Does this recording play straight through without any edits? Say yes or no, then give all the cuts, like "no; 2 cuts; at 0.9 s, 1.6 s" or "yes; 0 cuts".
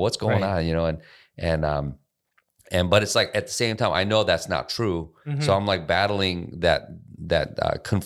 yes; 0 cuts